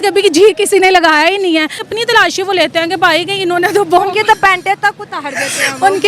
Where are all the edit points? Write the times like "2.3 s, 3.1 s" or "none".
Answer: 1.9 s

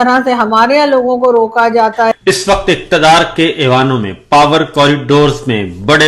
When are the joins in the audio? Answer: 2.1 s

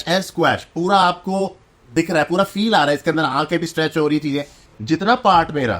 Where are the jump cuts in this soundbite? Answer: 4.6 s

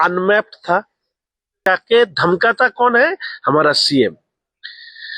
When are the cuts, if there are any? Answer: 1.7 s

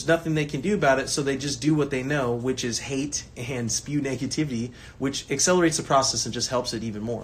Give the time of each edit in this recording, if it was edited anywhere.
none

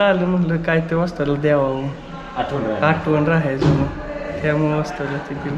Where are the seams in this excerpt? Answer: none

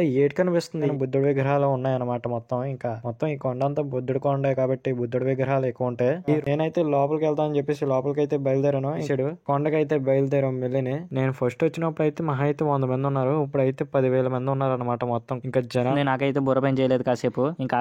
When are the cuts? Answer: 0.9 s, 6.4 s, 9.0 s, 15.7 s

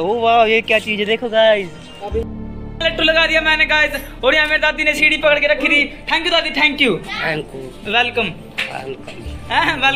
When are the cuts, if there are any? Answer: 2.3 s

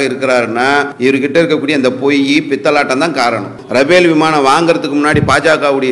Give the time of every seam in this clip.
0.9 s, 3.6 s

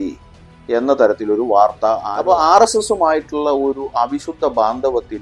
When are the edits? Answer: 2.1 s

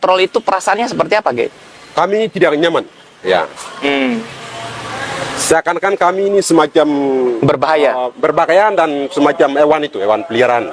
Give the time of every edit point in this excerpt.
none

